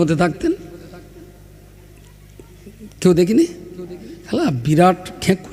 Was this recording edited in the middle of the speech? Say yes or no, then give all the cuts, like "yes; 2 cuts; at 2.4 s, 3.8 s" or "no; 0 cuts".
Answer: no; 0 cuts